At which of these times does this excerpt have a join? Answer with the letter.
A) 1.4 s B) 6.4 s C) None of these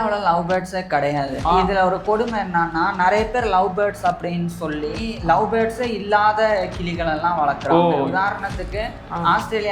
A